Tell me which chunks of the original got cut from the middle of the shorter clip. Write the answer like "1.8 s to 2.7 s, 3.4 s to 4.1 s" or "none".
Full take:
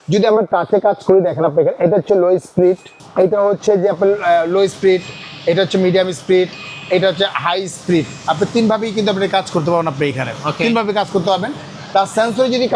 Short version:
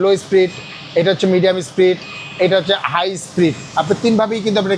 none